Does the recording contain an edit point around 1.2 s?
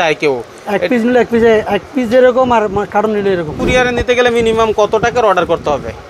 no; 1 cut; at 3.6 s

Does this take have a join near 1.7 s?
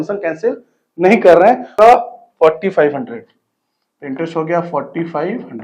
yes; 1 cut; at 1.7 s

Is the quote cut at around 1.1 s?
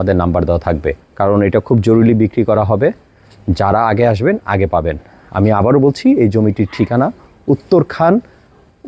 yes; 1 cut; at 1.1 s

